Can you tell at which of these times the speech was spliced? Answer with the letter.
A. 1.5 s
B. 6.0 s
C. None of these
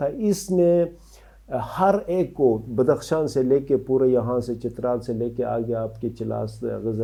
C